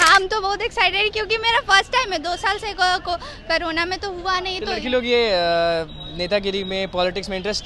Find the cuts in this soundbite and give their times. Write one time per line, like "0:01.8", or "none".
none